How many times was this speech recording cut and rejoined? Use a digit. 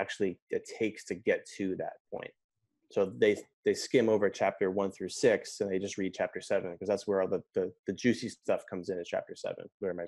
0